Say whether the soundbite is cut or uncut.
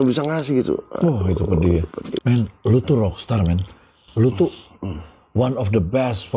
cut